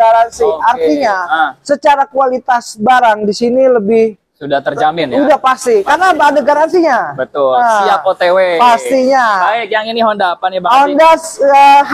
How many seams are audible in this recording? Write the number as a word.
zero